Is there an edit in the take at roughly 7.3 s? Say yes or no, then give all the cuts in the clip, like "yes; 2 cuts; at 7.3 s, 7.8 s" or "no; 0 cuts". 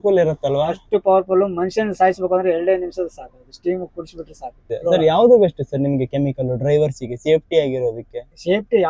no; 1 cut; at 4.5 s